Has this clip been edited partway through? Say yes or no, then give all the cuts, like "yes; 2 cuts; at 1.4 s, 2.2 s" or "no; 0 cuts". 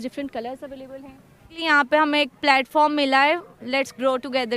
yes; 1 cut; at 1.6 s